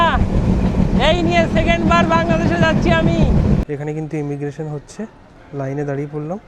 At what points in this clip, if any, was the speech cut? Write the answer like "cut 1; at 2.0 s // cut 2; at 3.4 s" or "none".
cut 1; at 3.6 s